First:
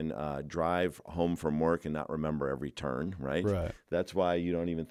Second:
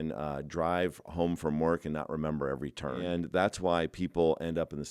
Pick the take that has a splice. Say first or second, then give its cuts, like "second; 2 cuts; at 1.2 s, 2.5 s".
second; 1 cut; at 3.0 s